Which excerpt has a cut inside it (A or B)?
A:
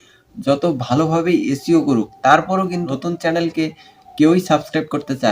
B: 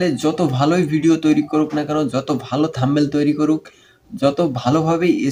A